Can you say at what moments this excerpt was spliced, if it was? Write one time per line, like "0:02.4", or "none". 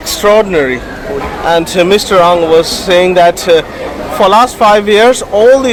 none